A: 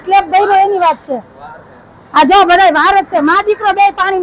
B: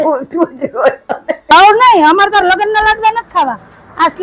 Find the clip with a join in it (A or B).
B